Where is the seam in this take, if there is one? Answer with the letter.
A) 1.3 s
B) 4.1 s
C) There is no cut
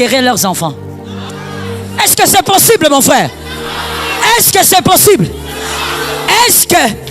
A